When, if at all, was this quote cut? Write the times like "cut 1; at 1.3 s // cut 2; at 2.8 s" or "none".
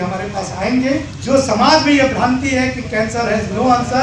cut 1; at 1.1 s